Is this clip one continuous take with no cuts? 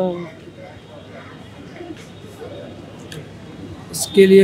yes; 0 cuts

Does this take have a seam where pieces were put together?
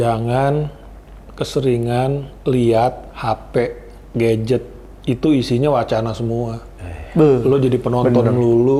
no; 0 cuts

